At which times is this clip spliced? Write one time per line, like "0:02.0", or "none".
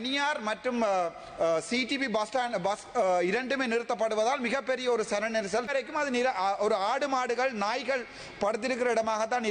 0:05.7